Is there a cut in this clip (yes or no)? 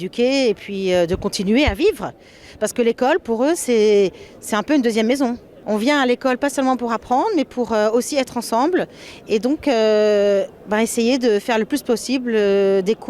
yes